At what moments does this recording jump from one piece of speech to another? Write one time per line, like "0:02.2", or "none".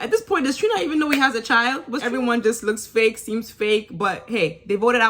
0:01.9